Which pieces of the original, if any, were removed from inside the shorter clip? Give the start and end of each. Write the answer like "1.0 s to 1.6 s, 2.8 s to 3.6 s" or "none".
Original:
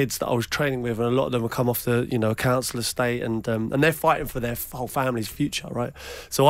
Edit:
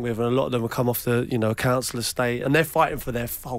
3.2 s to 3.7 s